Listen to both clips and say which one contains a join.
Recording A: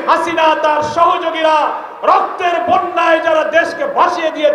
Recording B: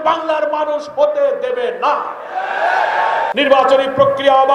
B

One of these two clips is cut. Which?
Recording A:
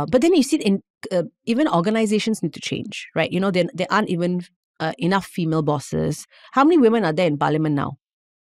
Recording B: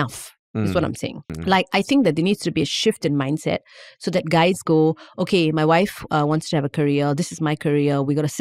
B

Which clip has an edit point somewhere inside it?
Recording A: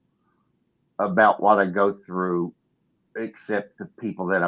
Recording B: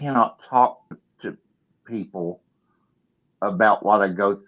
B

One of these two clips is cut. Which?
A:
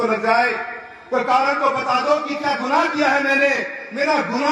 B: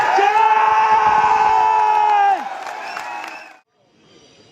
B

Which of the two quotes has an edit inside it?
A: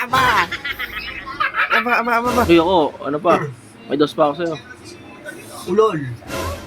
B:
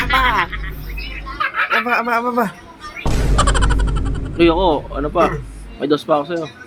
A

